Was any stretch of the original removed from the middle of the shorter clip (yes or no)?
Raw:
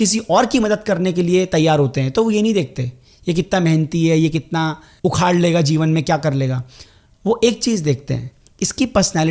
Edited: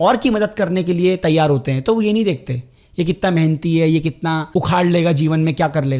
yes